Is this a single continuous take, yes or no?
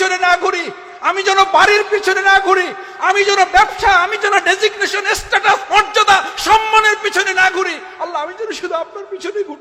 yes